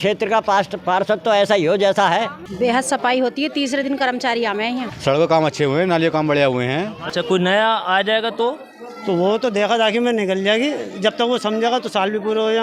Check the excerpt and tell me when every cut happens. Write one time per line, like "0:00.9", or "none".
0:02.4
0:04.9
0:07.0

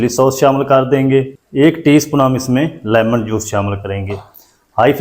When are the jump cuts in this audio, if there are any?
0:01.4

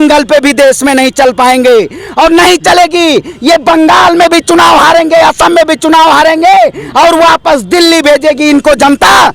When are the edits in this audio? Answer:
none

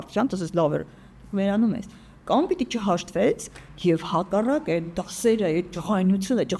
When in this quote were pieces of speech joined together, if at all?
none

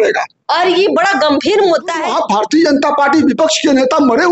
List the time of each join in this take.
0:02.1

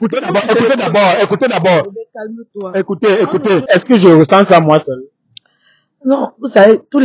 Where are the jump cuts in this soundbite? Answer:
0:03.7

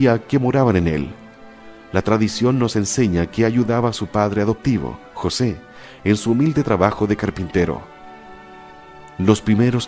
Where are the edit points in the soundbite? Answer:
none

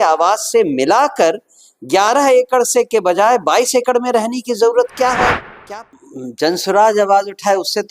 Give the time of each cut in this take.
0:05.6

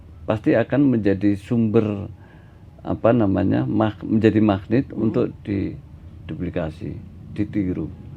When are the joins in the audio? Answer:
none

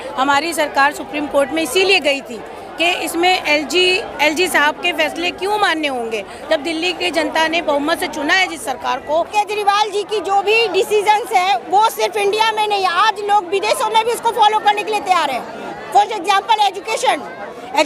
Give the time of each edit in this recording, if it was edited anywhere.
0:09.3

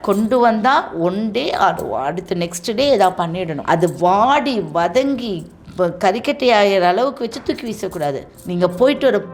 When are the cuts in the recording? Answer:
0:03.5
0:08.3

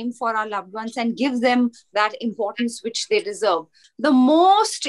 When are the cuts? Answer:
0:03.8

